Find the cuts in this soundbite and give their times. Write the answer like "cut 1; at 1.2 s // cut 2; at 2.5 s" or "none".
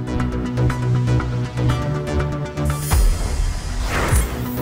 cut 1; at 2.9 s